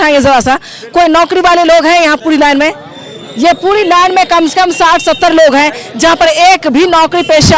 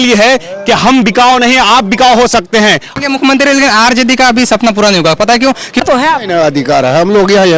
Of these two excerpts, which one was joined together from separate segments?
second; 2 cuts; at 2.9 s, 5.8 s

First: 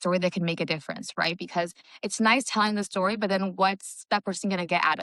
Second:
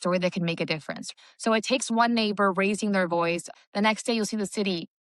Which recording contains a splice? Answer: second; 2 cuts; at 1.1 s, 3.4 s

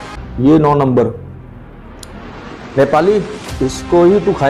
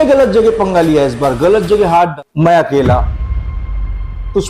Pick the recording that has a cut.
second; 1 cut; at 2.1 s

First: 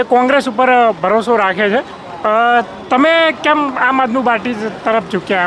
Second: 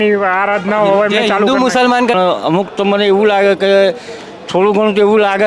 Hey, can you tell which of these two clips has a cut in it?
second; 1 cut; at 2.1 s

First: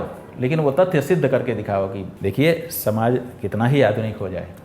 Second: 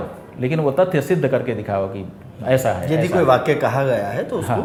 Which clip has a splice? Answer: first; 1 cut; at 2.1 s

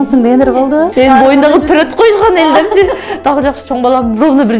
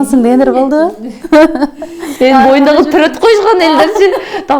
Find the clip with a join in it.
first; 1 cut; at 0.9 s

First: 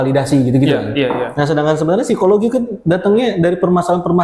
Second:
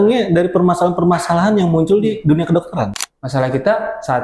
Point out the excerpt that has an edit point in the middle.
second; 1 cut; at 3.0 s

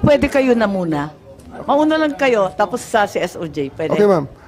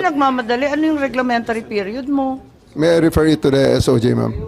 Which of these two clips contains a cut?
second; 1 cut; at 2.6 s

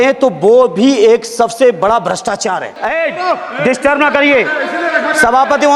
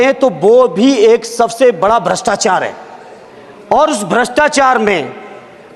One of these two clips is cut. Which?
first; 1 cut; at 2.8 s

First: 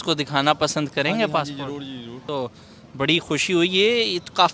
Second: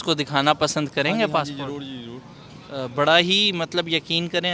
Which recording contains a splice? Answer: first; 1 cut; at 2.3 s

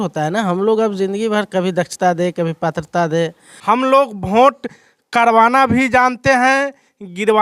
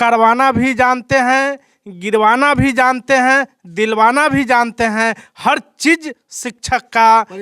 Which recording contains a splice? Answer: first; 1 cut; at 3.5 s

